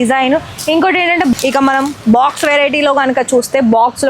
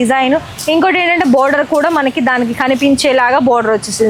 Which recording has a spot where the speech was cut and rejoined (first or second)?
first